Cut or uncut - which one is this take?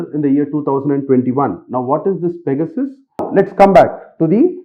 cut